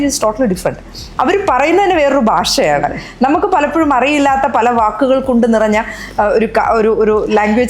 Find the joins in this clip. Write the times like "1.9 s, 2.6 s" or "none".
none